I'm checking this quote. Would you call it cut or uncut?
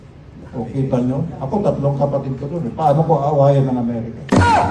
uncut